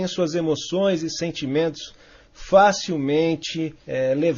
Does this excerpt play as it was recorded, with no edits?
no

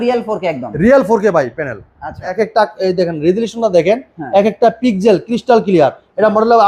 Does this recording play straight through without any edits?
no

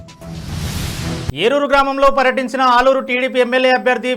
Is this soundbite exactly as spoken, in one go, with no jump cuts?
no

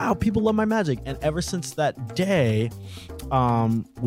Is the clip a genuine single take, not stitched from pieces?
yes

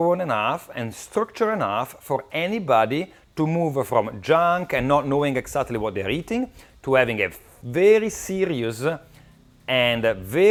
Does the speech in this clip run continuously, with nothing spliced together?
yes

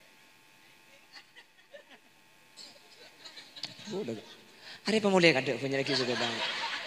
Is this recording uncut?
no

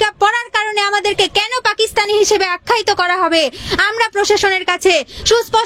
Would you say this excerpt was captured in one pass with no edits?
yes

